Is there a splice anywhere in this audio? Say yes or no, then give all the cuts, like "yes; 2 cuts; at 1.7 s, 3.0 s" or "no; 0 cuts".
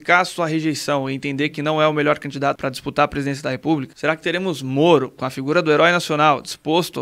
yes; 2 cuts; at 2.6 s, 3.9 s